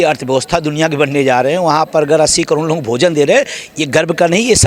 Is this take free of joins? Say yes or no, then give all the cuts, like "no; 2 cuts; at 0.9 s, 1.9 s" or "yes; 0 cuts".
yes; 0 cuts